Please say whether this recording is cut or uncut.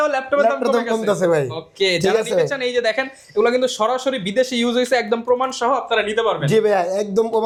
uncut